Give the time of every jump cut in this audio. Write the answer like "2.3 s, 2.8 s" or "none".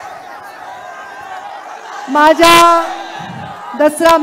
1.6 s